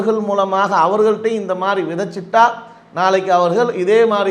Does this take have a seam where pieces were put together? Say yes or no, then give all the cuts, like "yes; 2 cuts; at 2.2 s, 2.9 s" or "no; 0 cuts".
no; 0 cuts